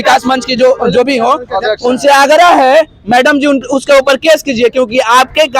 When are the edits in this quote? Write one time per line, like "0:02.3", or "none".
none